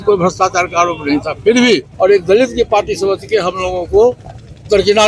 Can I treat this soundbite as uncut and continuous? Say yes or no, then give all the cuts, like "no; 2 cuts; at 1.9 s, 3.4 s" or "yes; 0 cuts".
no; 1 cut; at 1.9 s